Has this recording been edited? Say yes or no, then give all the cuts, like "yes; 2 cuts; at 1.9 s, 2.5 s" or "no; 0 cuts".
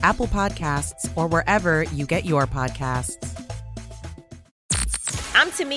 yes; 1 cut; at 4.4 s